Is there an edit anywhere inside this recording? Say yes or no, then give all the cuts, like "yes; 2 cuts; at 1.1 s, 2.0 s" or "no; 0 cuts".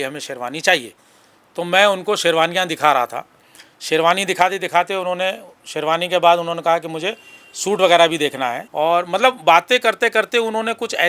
yes; 1 cut; at 8.6 s